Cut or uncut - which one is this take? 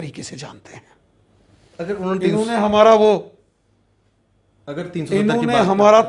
uncut